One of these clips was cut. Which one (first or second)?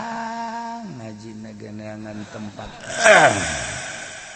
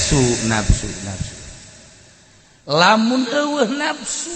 first